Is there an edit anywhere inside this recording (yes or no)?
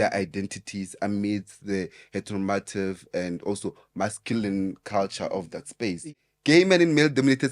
yes